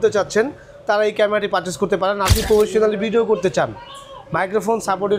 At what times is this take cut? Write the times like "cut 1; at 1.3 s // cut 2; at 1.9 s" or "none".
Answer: cut 1; at 2.3 s